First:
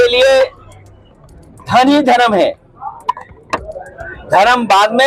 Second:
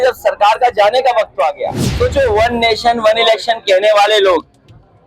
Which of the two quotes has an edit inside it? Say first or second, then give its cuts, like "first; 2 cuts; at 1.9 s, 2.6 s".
second; 1 cut; at 1.9 s